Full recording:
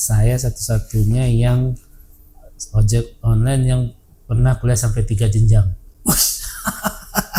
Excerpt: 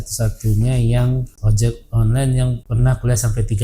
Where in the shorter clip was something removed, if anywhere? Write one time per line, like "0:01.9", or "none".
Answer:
0:01.4
0:02.6